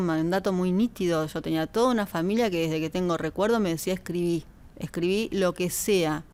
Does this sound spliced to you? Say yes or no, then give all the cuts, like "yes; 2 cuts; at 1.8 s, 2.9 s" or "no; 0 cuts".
no; 0 cuts